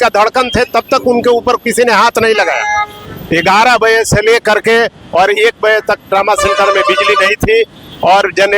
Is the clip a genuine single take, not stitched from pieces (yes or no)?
no